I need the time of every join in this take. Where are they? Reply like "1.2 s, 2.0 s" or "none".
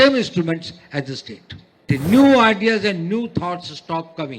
1.9 s